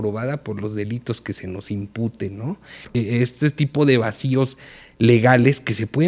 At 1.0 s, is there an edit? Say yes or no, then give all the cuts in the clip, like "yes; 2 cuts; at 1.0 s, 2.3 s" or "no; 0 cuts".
no; 1 cut; at 2.7 s